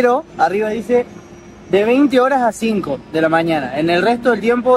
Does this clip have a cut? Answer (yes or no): no